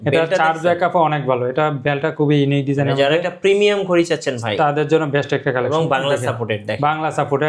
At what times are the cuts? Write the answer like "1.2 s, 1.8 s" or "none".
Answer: none